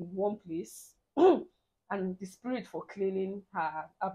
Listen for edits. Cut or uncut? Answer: uncut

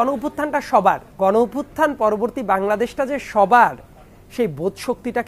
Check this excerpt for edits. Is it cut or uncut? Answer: cut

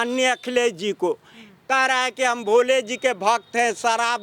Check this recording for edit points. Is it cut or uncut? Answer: uncut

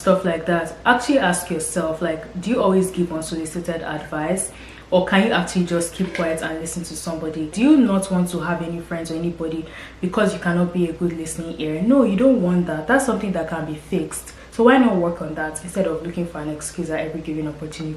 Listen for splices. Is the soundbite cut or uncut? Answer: cut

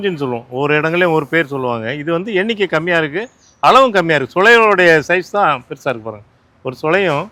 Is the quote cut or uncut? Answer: uncut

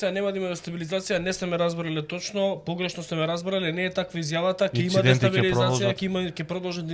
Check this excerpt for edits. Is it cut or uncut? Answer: uncut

